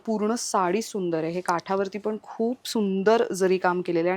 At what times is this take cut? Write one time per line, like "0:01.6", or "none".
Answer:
none